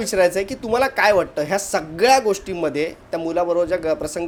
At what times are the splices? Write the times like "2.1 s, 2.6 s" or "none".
none